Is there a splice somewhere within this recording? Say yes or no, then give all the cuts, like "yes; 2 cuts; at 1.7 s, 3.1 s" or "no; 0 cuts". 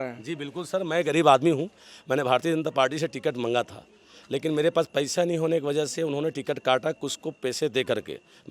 no; 0 cuts